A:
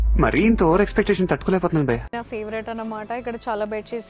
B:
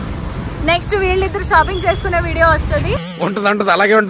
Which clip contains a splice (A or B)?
A